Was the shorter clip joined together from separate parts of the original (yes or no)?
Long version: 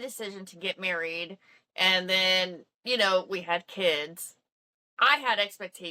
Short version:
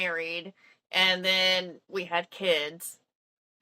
yes